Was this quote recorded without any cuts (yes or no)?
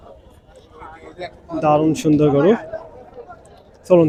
yes